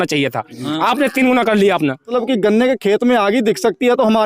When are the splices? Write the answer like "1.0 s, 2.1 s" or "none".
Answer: 2.1 s